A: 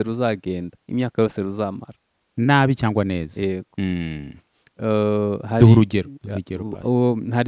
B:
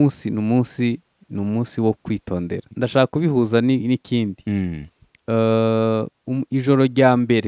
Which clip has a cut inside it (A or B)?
B